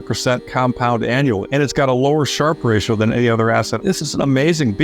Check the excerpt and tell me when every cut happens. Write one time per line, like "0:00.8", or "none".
0:01.4
0:03.7